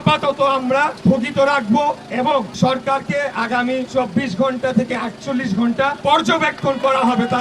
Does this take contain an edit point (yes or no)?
yes